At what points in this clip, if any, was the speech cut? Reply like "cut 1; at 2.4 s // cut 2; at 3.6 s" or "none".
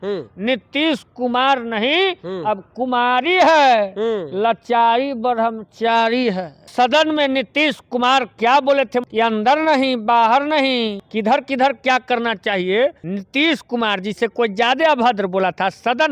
cut 1; at 6.7 s // cut 2; at 9.1 s // cut 3; at 11.0 s // cut 4; at 13.1 s